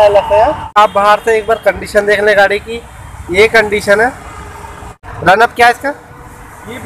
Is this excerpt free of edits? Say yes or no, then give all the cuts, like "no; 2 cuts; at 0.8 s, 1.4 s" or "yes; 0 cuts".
no; 2 cuts; at 0.8 s, 5.0 s